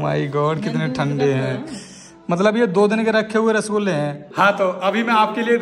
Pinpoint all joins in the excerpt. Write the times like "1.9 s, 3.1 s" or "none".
4.2 s